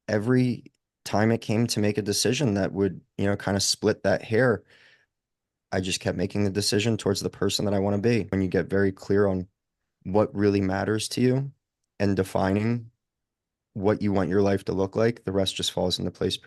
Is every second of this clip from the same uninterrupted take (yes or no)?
no